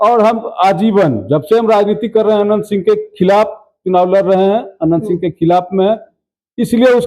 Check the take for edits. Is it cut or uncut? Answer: uncut